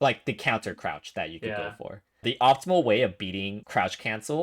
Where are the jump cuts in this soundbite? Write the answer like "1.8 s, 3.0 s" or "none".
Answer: 2.2 s, 3.6 s